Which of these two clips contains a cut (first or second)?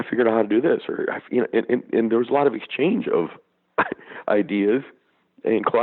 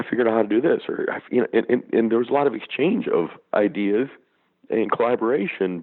second